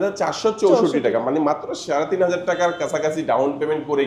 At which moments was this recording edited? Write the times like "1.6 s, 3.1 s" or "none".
none